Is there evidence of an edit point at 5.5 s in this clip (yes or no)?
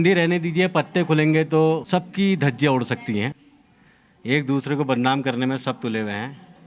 no